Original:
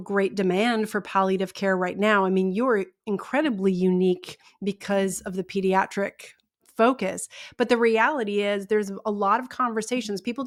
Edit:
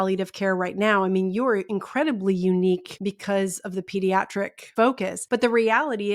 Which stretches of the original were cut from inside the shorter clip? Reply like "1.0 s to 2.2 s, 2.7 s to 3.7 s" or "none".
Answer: 2.9 s to 3.1 s, 4.3 s to 4.5 s, 6.6 s to 7.3 s

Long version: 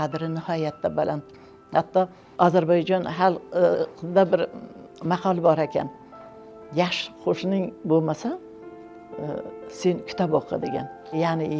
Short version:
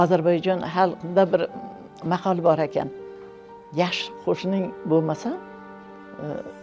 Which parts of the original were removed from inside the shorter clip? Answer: 3.4 s to 4.0 s

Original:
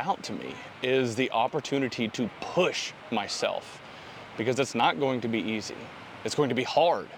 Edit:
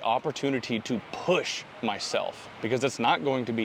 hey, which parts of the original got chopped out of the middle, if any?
3.7 s to 4.2 s

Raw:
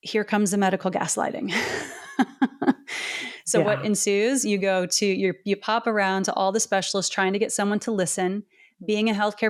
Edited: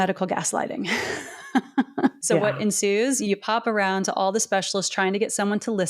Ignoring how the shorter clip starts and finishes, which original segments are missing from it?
2.8 s to 3.4 s, 4.4 s to 5.4 s

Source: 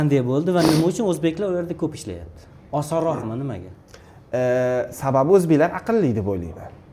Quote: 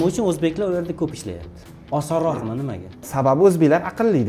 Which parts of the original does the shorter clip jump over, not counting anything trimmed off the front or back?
3.9 s to 4.9 s

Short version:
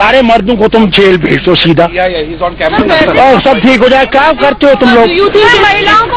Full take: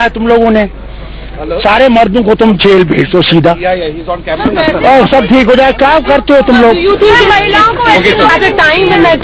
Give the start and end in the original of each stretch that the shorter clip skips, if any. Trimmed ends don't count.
none

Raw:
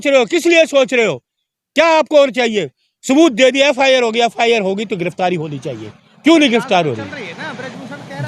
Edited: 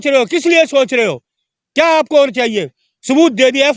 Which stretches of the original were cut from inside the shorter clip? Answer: none

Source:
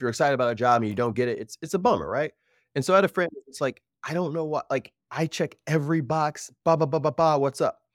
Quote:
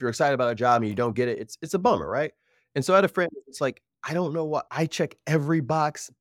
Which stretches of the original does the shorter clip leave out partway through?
4.6 s to 5.1 s

